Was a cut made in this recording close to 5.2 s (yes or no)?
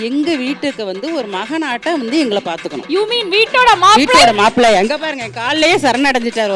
no